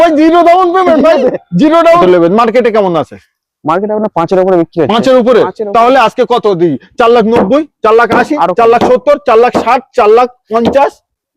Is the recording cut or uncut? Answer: cut